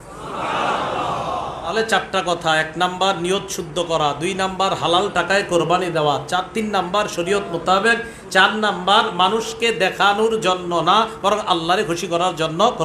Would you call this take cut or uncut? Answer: cut